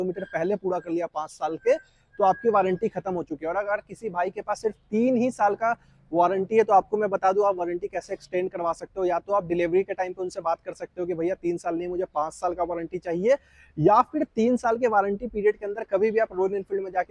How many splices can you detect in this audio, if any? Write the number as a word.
zero